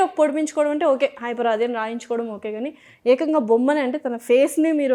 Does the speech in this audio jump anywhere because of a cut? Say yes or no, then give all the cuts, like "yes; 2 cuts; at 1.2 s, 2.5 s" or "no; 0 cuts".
no; 0 cuts